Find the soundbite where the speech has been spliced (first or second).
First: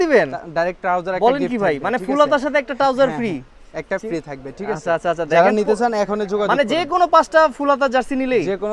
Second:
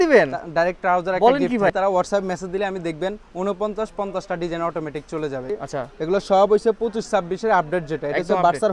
second